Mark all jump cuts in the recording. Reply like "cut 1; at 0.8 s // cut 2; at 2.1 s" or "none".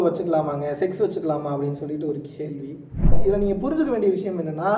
cut 1; at 3.2 s